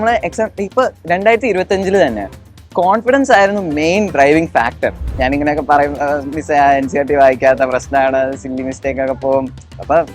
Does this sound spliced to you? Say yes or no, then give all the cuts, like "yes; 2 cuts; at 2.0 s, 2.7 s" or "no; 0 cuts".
yes; 1 cut; at 5.1 s